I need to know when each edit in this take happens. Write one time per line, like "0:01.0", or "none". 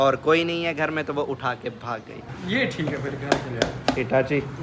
0:02.3

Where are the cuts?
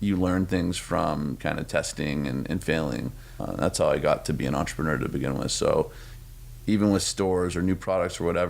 0:03.4

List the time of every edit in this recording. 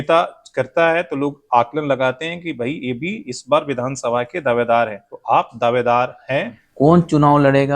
0:05.1
0:06.6

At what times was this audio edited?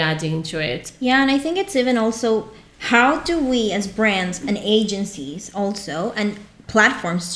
none

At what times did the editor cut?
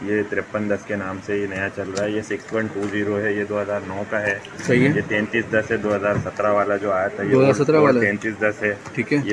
none

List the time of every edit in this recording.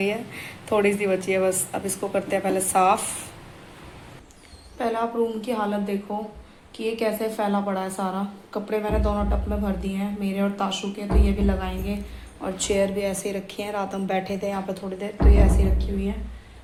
none

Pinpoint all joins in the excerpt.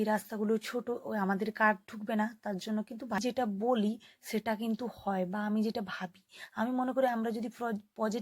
0:03.2

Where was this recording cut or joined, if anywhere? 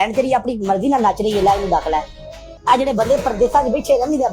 none

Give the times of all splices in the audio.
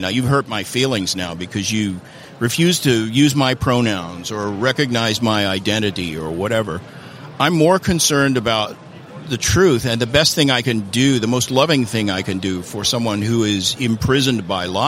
none

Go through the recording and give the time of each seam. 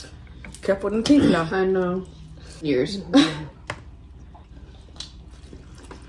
0:02.6
0:04.5

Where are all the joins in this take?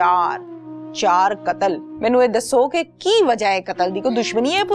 0:01.9

